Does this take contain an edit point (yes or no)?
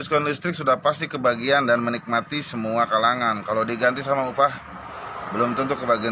no